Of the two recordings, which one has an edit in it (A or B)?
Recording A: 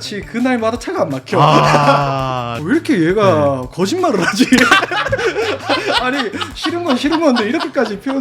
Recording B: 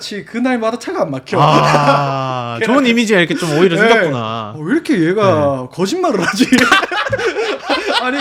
A